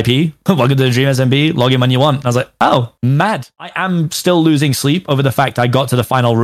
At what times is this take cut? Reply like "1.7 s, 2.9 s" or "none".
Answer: 3.5 s

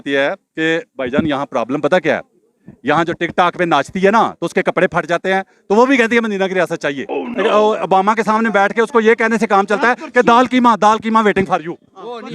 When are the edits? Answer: 7.2 s

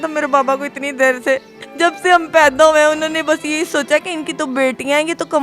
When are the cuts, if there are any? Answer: 1.6 s

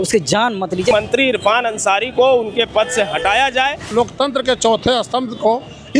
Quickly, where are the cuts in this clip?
0.9 s, 3.9 s

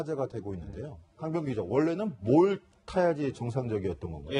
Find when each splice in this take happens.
1.2 s

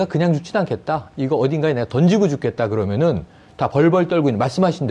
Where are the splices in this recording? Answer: none

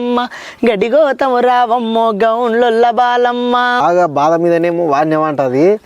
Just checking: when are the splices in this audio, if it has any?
3.8 s

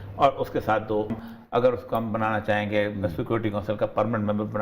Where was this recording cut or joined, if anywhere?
1.1 s

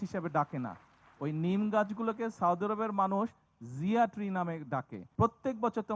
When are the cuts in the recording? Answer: 5.0 s

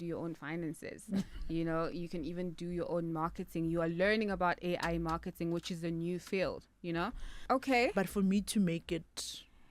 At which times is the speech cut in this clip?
7.4 s

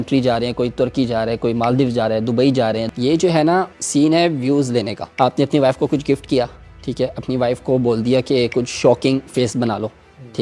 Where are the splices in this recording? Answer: 2.9 s, 3.8 s, 5.0 s

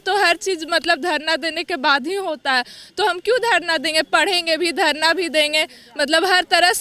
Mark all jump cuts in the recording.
none

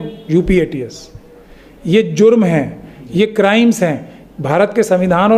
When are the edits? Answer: none

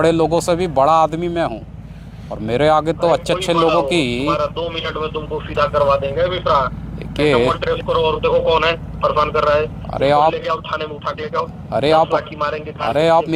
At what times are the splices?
none

